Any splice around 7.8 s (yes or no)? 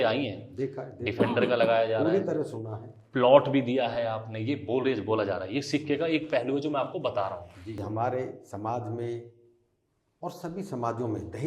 yes